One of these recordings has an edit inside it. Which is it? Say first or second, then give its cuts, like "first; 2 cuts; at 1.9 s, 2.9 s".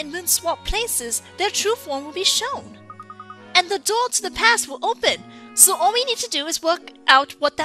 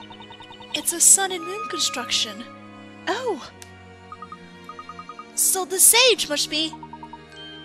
first; 1 cut; at 1.8 s